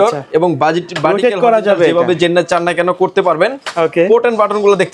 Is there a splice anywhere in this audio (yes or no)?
no